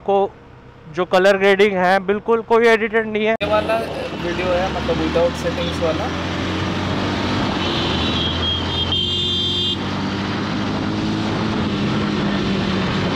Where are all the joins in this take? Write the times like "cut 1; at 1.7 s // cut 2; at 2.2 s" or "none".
cut 1; at 3.4 s